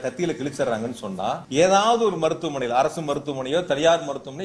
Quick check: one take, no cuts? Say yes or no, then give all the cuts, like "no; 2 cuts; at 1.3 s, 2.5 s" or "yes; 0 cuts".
no; 1 cut; at 1.4 s